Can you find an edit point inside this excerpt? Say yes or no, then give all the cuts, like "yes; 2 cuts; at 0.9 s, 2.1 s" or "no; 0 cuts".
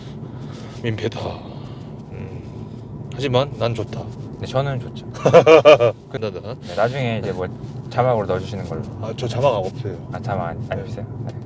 yes; 1 cut; at 6.2 s